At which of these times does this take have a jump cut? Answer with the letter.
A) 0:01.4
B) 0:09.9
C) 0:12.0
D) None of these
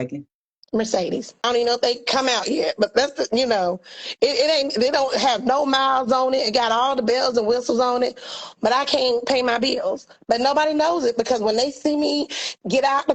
A